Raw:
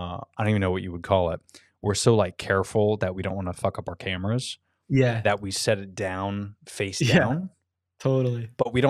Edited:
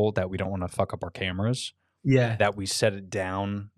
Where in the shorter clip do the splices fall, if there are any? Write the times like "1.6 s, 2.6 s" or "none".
none